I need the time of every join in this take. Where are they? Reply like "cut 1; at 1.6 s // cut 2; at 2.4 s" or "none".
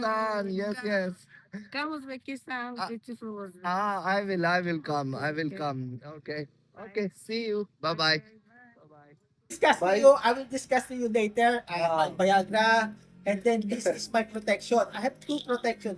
cut 1; at 9.5 s